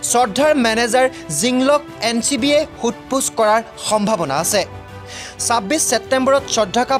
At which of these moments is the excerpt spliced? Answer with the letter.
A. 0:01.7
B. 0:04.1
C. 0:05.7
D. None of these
D